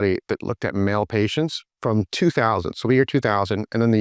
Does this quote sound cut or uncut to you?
cut